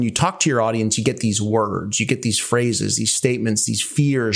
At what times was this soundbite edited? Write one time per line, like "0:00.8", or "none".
none